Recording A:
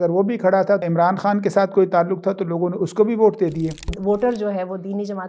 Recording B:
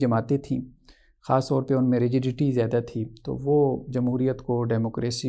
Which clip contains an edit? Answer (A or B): A